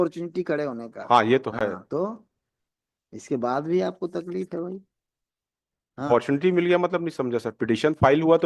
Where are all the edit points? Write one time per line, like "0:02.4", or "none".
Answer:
none